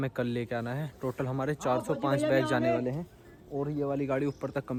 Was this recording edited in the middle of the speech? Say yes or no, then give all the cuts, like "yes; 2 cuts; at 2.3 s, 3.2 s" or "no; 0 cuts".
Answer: no; 0 cuts